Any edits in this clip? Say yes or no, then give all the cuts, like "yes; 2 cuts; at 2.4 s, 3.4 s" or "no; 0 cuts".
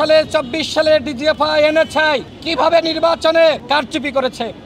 yes; 2 cuts; at 2.4 s, 3.6 s